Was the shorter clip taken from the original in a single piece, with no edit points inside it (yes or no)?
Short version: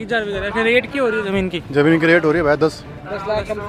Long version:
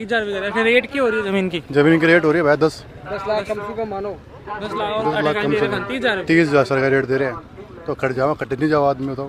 yes